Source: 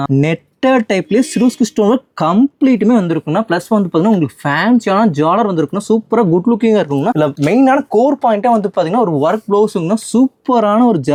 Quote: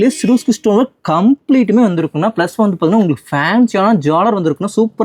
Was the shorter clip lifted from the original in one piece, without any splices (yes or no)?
yes